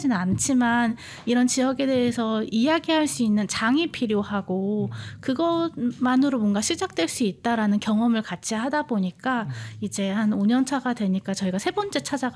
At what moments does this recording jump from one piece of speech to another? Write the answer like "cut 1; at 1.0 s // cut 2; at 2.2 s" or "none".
none

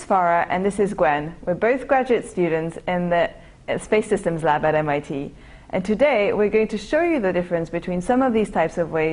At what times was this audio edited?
cut 1; at 3.8 s

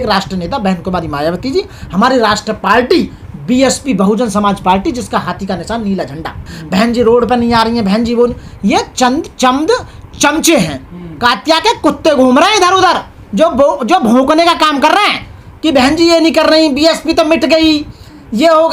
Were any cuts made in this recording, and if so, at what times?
cut 1; at 6.5 s

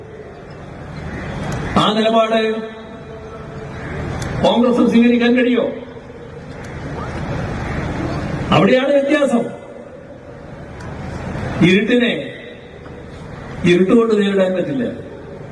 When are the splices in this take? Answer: cut 1; at 11.4 s

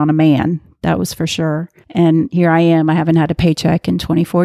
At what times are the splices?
cut 1; at 1.8 s

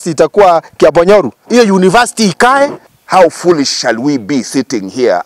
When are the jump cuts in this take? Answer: cut 1; at 2.9 s

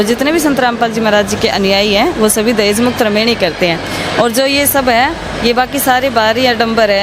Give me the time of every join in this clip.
none

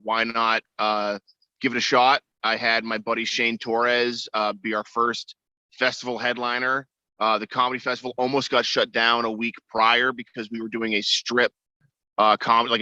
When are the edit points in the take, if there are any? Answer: none

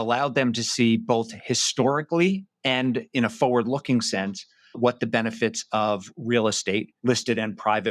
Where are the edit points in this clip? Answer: cut 1; at 6.9 s

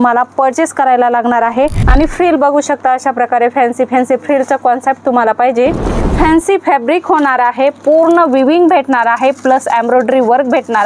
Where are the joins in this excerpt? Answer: cut 1; at 1.8 s // cut 2; at 5.9 s

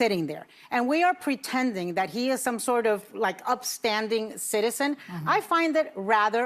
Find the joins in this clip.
none

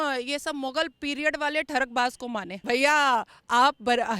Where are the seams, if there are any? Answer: cut 1; at 2.5 s

